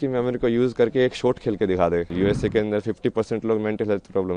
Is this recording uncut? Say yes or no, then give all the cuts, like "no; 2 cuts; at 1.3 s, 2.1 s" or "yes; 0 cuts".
no; 1 cut; at 2.1 s